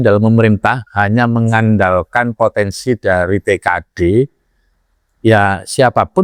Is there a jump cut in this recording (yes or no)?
no